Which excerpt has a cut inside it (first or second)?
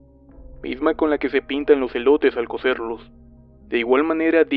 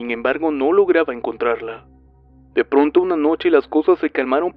second